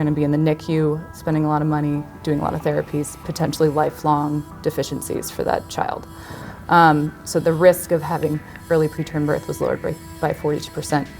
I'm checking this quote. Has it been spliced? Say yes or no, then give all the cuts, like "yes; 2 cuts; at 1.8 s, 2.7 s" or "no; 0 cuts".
yes; 1 cut; at 7.2 s